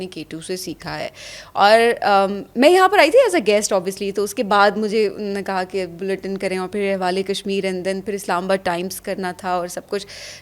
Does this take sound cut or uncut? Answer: uncut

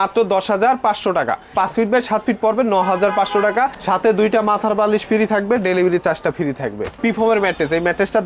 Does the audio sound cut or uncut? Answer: cut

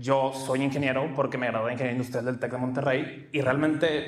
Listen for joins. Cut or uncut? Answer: cut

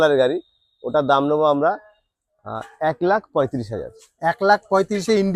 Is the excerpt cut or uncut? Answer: uncut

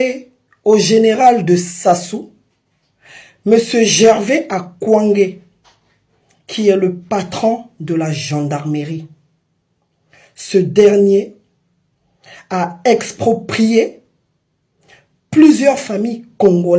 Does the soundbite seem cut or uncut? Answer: uncut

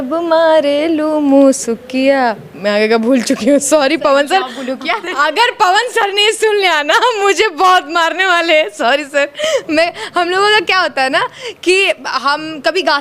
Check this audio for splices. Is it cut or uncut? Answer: uncut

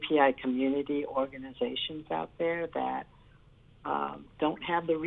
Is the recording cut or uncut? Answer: uncut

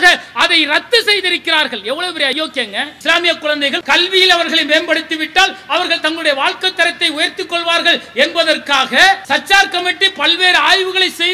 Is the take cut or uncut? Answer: cut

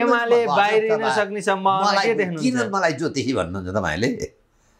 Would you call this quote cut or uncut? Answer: uncut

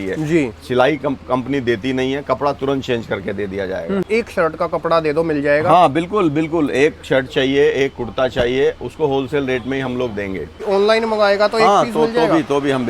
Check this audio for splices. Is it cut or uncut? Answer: cut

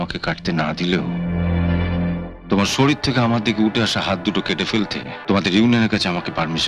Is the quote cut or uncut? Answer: cut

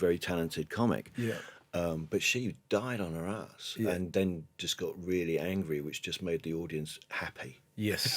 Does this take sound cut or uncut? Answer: uncut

